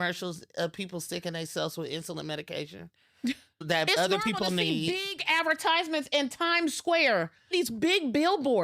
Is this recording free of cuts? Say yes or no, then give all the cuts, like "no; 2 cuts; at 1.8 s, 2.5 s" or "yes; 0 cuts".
no; 1 cut; at 7.5 s